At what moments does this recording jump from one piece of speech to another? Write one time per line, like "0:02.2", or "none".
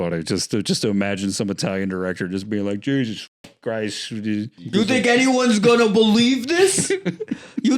0:04.6